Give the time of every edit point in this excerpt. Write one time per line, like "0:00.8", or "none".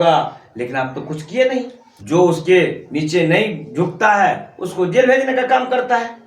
0:01.9